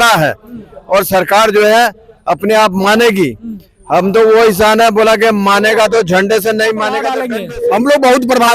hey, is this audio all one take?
no; 1 cut; at 7.2 s

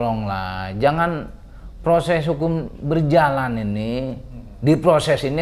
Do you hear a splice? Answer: no; 0 cuts

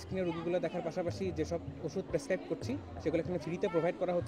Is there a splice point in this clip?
no; 0 cuts

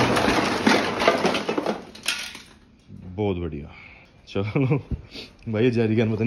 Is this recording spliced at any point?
no; 0 cuts

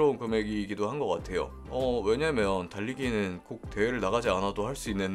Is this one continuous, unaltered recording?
yes; 0 cuts

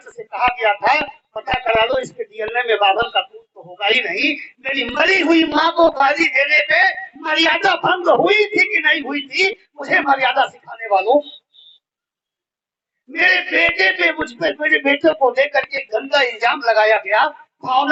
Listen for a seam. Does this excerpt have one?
no; 0 cuts

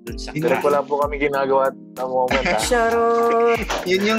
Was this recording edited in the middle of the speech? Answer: no; 0 cuts

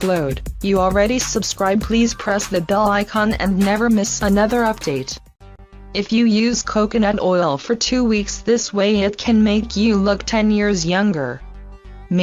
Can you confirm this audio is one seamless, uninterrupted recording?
yes; 0 cuts

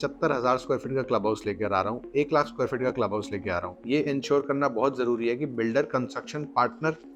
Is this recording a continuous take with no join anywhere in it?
no; 1 cut; at 3.7 s

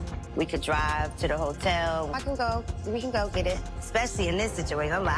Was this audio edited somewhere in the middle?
no; 0 cuts

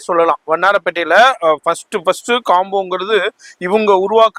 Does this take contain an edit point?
no; 0 cuts

